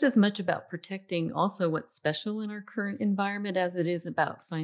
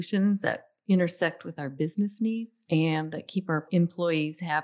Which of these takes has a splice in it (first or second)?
second